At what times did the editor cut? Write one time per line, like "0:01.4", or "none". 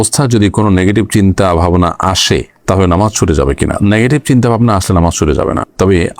none